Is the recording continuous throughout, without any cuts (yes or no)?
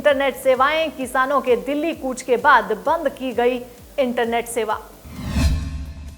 no